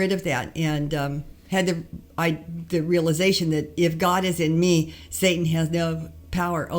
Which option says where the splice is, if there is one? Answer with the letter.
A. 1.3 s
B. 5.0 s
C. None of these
A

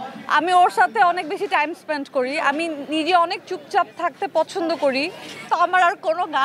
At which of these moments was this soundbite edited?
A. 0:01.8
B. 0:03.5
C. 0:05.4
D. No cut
C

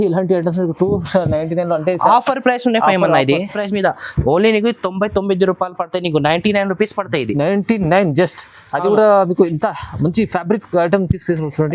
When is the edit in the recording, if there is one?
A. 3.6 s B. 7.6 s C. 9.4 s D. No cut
A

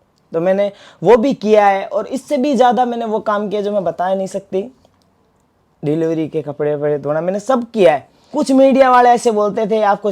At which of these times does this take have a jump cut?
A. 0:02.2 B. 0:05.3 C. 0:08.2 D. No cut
C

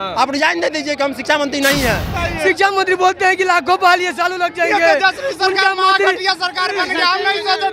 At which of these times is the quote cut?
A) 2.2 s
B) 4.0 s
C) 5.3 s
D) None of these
A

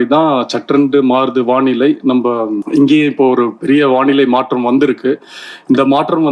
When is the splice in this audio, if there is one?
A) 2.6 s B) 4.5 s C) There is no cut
A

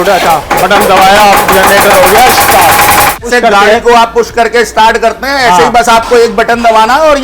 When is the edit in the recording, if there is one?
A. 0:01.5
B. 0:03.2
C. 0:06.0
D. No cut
B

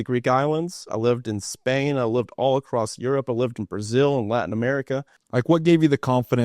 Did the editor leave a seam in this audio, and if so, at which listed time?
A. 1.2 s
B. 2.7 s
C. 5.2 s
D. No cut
C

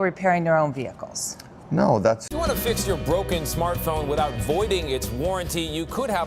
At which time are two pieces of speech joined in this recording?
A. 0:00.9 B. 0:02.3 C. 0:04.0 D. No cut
B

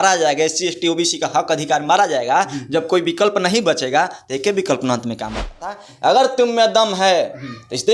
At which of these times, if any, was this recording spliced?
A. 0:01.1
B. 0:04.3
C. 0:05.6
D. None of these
C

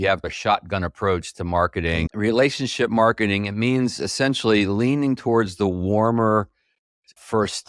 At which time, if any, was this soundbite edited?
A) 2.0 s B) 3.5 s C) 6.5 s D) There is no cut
A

